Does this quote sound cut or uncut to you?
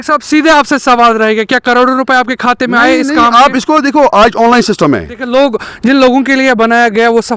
cut